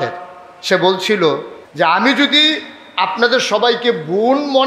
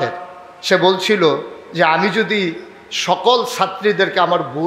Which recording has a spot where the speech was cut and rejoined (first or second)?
first